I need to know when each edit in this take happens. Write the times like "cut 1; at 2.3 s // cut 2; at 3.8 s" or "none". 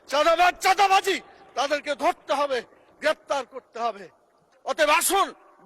cut 1; at 4.5 s